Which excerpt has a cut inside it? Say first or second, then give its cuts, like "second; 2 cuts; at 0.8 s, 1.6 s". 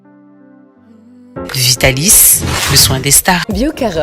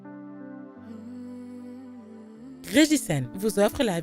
first; 1 cut; at 1.2 s